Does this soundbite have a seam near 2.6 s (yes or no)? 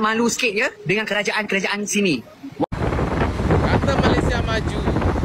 yes